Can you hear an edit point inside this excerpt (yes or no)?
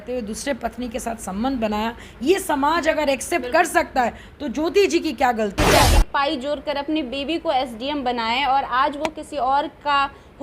yes